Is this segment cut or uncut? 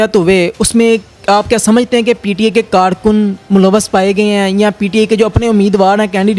uncut